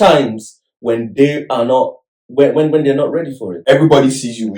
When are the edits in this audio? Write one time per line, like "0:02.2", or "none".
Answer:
0:03.6